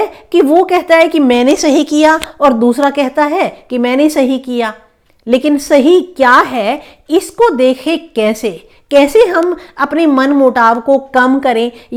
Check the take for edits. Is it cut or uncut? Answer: uncut